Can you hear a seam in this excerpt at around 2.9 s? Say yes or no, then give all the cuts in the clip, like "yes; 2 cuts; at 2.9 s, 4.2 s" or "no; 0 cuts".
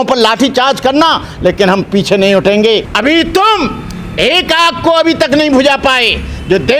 yes; 1 cut; at 2.9 s